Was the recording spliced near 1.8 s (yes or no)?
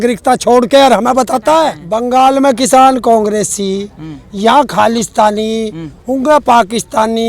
yes